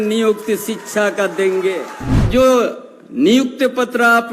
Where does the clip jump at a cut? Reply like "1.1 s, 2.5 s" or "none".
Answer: 2.2 s